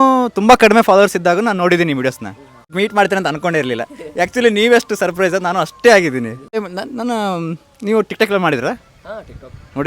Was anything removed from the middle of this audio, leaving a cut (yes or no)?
yes